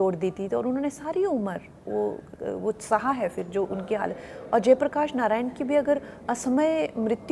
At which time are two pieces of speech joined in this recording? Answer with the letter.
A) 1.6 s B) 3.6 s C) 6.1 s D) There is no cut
D